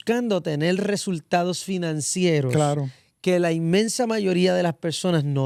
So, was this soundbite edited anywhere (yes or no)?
no